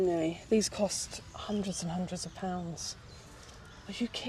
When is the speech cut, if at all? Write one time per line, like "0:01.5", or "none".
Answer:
none

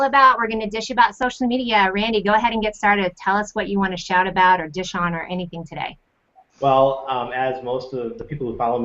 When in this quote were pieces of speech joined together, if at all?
0:04.6

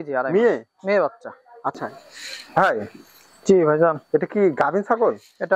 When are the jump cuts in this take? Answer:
0:01.9

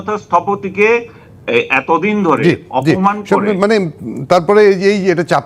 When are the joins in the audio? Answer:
none

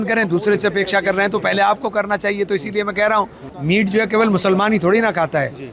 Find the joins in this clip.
0:03.4

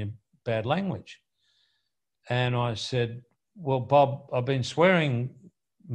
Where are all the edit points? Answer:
none

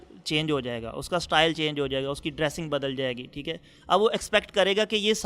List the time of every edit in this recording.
none

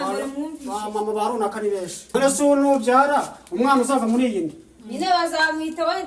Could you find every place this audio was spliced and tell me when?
0:02.0

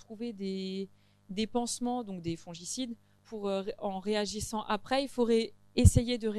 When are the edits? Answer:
0:03.2

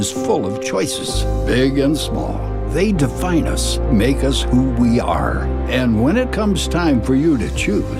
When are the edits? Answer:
none

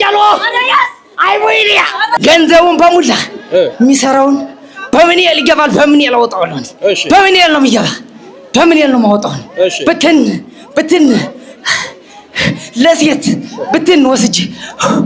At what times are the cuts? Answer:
0:02.2

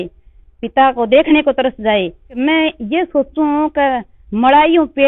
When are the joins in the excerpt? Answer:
0:02.2

